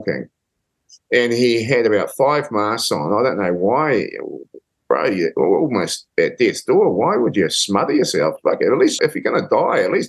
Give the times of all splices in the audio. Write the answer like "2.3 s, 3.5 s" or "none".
8.9 s